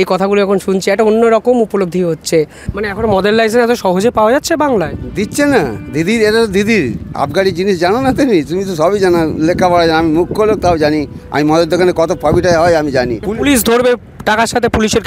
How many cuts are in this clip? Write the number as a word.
two